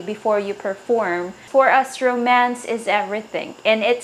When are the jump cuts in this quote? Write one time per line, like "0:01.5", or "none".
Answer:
0:01.4